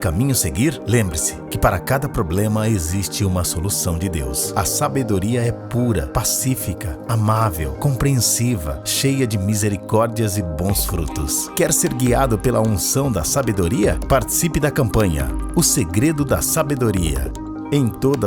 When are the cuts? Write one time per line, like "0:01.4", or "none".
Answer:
0:02.4